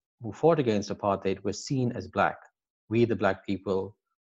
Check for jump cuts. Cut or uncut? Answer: uncut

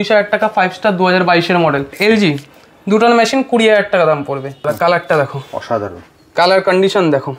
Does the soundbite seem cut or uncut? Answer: cut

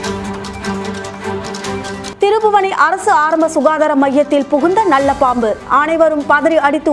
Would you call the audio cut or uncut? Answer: cut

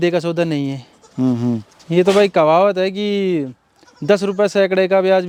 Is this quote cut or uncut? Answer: uncut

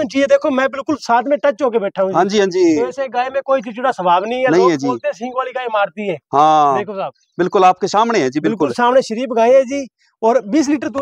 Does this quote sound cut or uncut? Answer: uncut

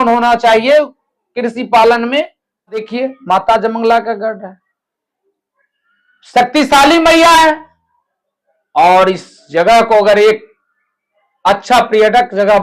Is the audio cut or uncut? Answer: cut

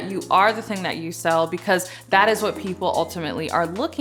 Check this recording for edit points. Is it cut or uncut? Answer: uncut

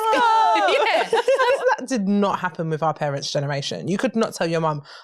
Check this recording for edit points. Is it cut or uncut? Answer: cut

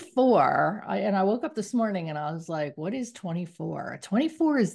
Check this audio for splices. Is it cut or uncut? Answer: uncut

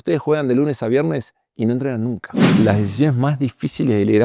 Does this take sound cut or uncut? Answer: cut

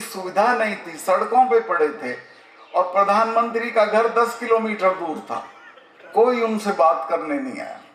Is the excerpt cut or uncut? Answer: uncut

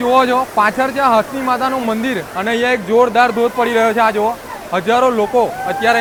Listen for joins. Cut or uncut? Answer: uncut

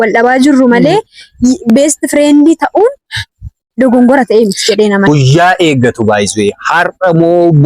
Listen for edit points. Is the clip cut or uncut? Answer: cut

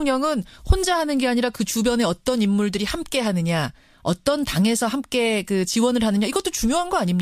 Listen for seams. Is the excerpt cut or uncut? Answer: uncut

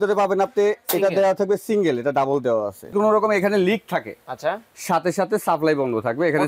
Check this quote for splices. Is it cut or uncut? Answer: cut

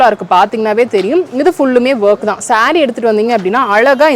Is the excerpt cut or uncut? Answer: uncut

